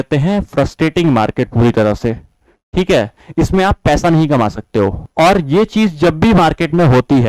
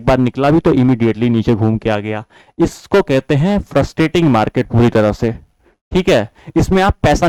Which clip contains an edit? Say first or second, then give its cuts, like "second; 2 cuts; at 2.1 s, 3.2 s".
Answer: first; 1 cut; at 5.0 s